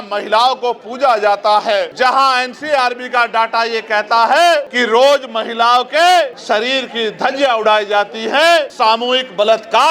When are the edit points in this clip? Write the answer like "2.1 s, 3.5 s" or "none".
1.9 s, 4.7 s, 6.4 s, 8.7 s